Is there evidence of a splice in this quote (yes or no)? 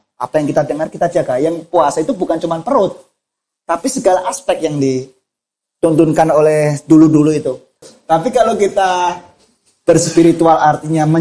yes